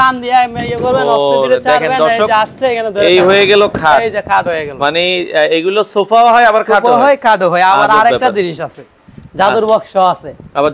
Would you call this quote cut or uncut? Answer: uncut